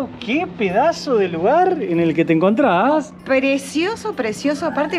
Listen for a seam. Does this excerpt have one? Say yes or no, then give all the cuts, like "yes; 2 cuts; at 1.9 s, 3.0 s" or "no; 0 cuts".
no; 0 cuts